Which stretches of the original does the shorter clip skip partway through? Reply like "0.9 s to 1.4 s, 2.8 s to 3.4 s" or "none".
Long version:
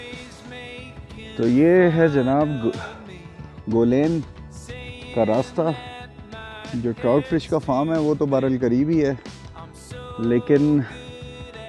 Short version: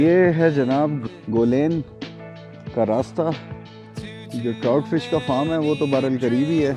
2.6 s to 3.4 s